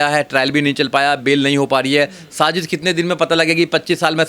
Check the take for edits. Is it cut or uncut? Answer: uncut